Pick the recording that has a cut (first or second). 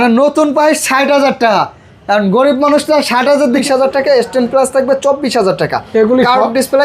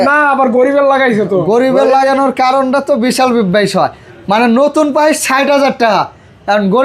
first